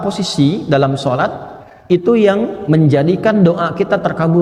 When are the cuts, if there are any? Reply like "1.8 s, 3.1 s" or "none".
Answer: none